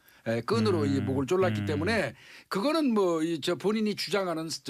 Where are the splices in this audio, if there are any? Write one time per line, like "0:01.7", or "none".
none